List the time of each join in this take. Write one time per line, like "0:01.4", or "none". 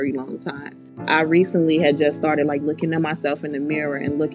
0:01.0